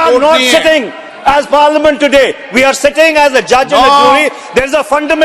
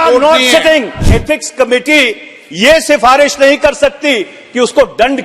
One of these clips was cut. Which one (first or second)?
second